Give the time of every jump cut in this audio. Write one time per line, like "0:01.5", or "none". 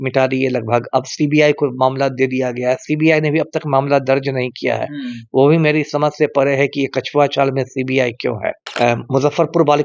0:08.6